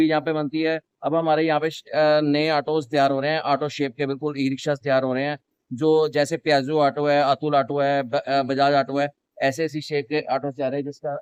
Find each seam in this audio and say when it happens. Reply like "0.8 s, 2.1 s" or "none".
none